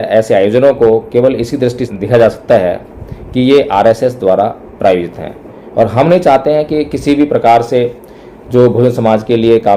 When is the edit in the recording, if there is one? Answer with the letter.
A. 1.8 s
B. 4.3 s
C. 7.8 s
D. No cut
A